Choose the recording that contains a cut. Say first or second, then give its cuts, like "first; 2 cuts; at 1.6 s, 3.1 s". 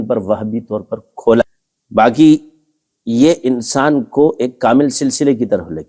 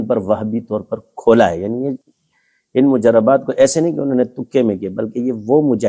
first; 1 cut; at 1.4 s